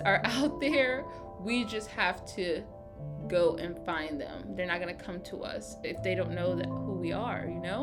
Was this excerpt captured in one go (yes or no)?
yes